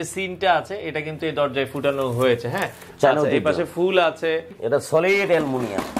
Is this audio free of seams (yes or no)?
no